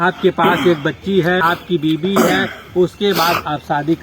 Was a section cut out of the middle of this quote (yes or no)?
yes